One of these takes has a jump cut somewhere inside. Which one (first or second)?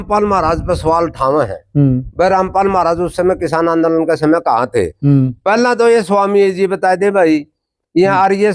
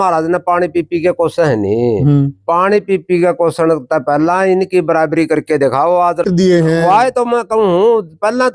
second